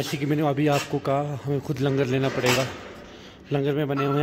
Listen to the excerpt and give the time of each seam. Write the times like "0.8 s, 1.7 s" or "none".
none